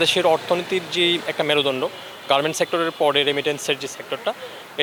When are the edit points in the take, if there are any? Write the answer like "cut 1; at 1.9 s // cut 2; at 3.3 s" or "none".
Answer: none